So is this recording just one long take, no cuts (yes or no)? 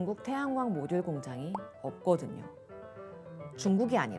yes